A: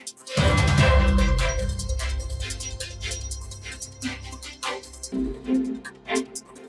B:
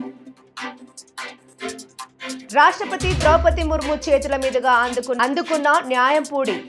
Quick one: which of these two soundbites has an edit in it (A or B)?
B